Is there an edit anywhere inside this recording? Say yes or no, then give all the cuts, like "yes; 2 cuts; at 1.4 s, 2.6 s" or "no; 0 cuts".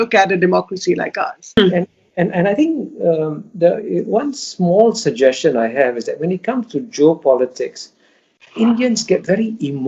yes; 1 cut; at 1.6 s